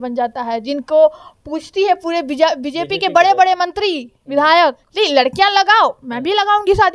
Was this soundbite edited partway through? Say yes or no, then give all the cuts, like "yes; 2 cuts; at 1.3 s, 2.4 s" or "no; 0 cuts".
yes; 1 cut; at 4.8 s